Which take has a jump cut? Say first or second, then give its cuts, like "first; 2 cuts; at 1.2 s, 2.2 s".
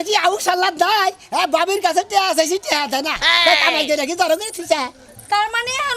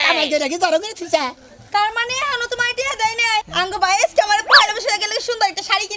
second; 1 cut; at 3.4 s